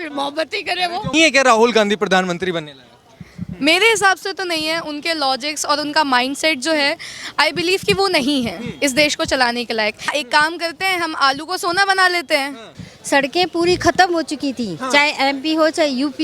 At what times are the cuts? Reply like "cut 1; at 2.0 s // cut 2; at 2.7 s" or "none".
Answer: cut 1; at 1.1 s // cut 2; at 10.1 s // cut 3; at 12.8 s